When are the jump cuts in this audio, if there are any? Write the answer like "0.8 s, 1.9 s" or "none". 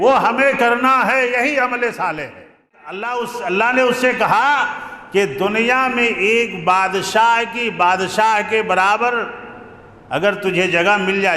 3.0 s